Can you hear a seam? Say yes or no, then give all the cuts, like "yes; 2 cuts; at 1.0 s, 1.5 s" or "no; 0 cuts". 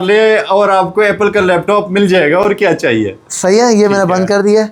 no; 0 cuts